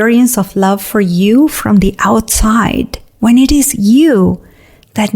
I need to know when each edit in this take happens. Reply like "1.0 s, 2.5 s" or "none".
3.0 s